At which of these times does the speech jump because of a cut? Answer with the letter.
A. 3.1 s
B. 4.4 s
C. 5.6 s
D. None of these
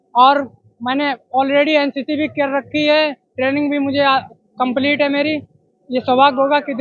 B